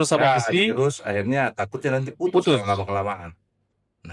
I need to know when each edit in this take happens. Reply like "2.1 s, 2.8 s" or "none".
none

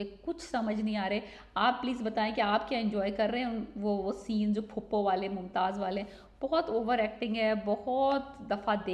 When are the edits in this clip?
none

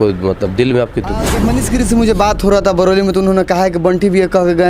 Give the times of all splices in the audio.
1.3 s

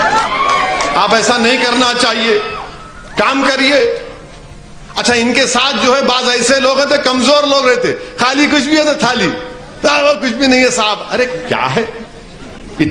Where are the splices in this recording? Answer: none

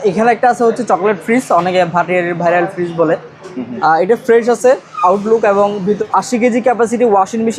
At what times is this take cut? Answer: 6.0 s

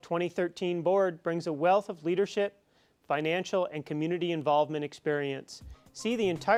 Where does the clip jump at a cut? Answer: none

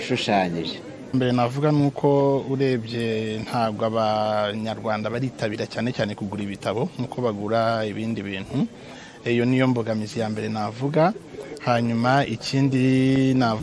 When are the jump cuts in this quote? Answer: 1.1 s

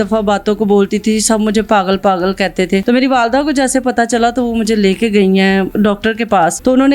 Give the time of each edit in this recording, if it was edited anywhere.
2.8 s, 6.2 s

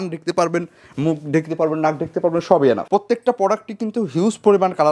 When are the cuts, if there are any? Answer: 2.8 s

